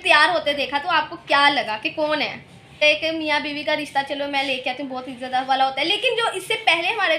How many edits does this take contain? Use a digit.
1